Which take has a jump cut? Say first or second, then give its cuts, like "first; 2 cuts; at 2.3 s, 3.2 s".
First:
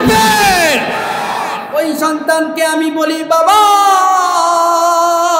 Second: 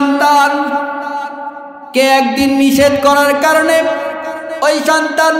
first; 1 cut; at 1.6 s